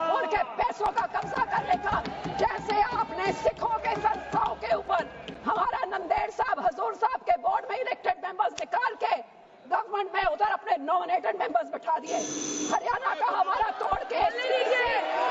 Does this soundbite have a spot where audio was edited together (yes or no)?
no